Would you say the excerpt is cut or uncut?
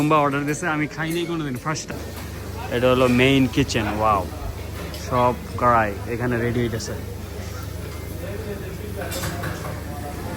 cut